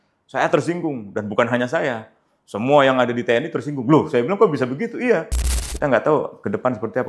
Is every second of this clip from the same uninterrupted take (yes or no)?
no